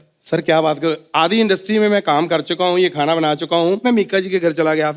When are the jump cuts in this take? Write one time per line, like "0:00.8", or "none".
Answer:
0:03.8